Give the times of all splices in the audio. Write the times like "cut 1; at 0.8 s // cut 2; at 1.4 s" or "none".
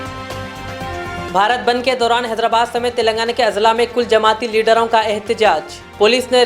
cut 1; at 1.3 s